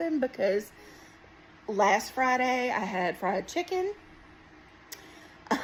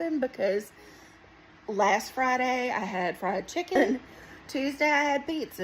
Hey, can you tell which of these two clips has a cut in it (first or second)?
second